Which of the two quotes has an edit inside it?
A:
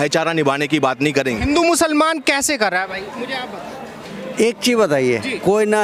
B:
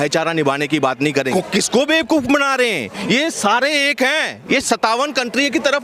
B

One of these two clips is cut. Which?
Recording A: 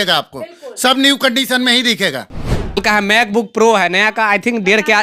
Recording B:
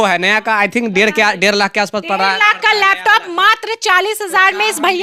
A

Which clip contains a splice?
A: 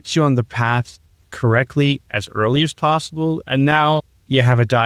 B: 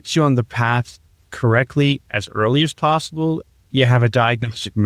B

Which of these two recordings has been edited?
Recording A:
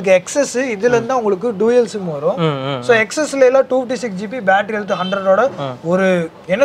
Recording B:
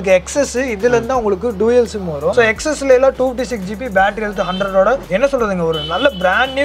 B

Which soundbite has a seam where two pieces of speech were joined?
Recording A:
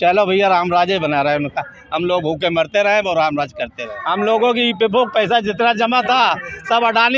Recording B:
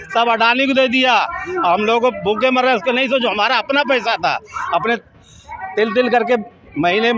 A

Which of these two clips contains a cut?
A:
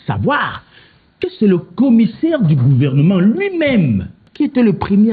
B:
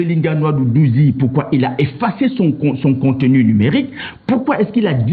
A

